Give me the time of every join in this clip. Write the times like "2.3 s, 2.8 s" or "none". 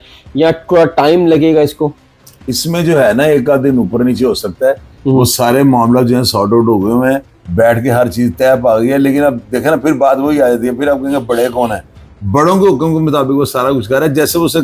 none

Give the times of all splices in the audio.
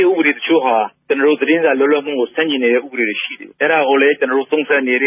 none

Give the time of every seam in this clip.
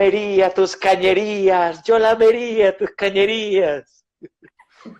none

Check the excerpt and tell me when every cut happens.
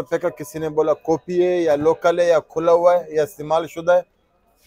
none

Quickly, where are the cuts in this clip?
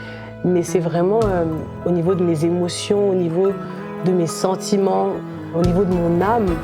1.7 s, 5.5 s

